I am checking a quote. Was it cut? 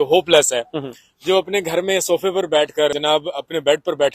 yes; 1 cut; at 3.0 s

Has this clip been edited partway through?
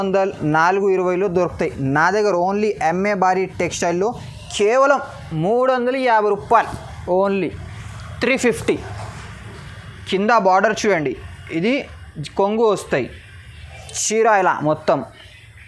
no; 0 cuts

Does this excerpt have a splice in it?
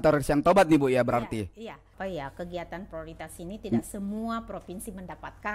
yes; 1 cut; at 1.8 s

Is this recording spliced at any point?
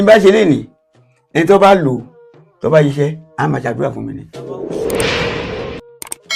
yes; 1 cut; at 4.4 s

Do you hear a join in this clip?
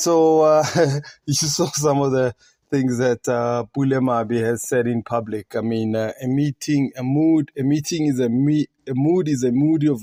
no; 0 cuts

